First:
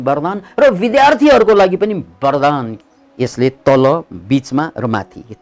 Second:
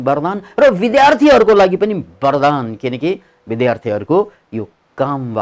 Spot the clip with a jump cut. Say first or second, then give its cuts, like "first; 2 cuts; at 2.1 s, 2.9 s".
first; 1 cut; at 2.7 s